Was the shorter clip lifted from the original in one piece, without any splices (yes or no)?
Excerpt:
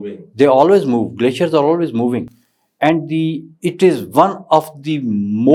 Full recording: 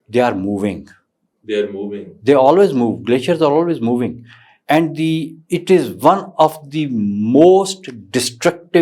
yes